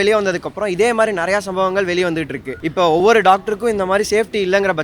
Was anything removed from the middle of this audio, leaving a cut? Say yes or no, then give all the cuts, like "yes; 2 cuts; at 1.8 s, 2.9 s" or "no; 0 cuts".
yes; 1 cut; at 3.0 s